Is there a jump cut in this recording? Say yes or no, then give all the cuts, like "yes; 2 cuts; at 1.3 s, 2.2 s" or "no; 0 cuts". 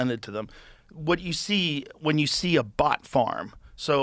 no; 0 cuts